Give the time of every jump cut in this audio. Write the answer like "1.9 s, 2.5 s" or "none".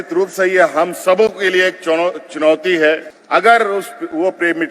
3.1 s